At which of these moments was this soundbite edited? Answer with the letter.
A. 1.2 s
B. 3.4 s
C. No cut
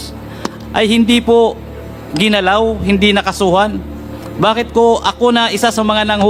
C